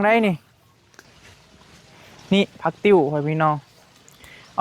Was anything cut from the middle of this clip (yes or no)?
yes